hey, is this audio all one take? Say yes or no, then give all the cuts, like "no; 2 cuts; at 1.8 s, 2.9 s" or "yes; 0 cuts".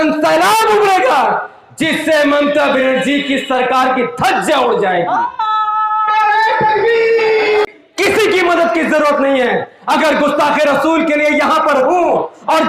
no; 1 cut; at 7.7 s